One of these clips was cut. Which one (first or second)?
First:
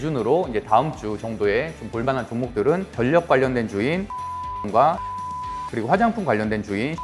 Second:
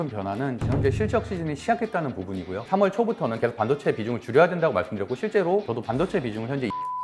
second